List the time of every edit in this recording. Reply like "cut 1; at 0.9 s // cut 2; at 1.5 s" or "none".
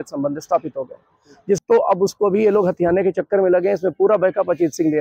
cut 1; at 1.6 s